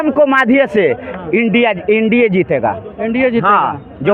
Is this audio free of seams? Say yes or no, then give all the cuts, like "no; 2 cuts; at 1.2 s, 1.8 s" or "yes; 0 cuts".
yes; 0 cuts